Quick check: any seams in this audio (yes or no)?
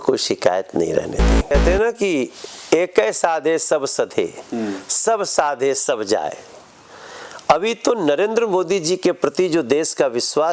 yes